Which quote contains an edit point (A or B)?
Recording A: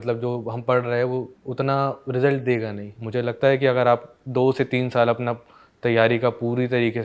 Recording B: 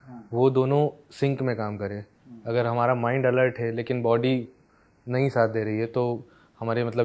A